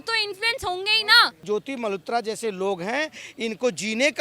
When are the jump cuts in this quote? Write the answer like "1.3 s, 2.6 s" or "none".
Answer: 1.4 s